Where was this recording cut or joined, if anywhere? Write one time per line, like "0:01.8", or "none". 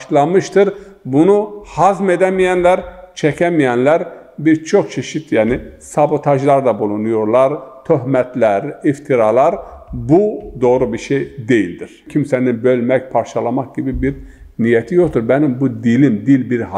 0:12.1